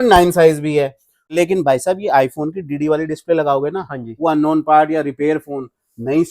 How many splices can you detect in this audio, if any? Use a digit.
1